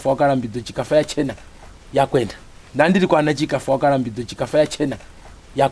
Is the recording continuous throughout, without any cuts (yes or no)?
yes